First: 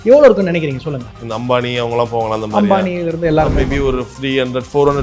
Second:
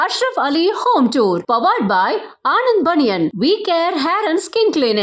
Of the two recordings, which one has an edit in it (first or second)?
first